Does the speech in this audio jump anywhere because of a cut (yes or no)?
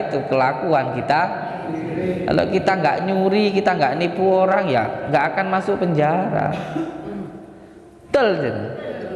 no